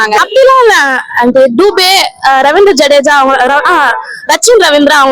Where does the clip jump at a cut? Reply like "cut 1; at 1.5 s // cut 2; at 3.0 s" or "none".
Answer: none